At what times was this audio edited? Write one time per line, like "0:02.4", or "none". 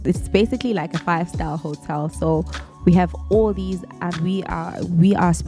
0:04.1